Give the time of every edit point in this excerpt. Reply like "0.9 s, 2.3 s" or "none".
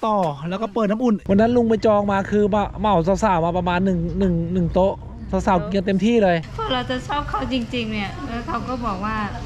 1.2 s, 6.6 s